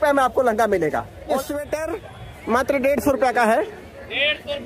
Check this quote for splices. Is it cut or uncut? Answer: cut